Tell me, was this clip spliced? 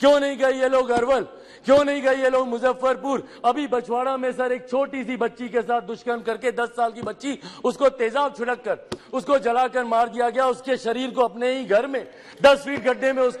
no; 0 cuts

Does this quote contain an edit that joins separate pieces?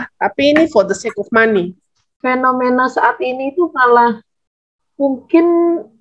yes; 1 cut; at 2.2 s

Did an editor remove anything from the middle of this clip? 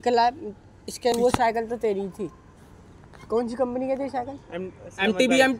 yes; 1 cut; at 1.1 s

